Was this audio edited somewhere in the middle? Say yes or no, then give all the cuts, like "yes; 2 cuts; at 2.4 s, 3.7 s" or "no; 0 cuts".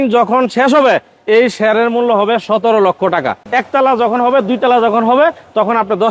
yes; 1 cut; at 3.4 s